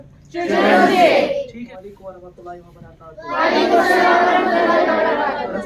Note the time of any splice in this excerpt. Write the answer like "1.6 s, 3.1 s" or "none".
1.7 s